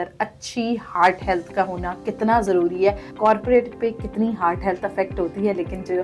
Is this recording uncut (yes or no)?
no